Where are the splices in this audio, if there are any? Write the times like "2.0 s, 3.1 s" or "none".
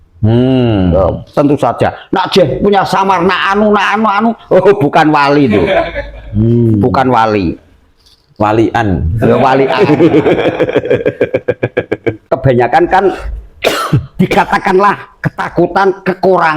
12.3 s